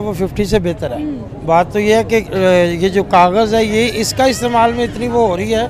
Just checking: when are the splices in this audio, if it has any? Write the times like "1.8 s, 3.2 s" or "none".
none